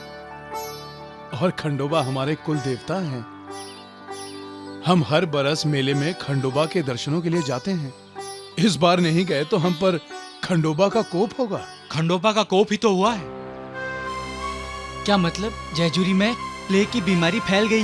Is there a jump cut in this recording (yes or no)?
no